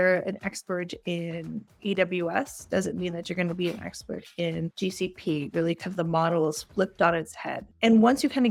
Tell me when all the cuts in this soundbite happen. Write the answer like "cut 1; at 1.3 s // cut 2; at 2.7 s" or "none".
none